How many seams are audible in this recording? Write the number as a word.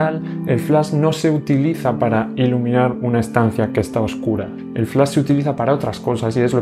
one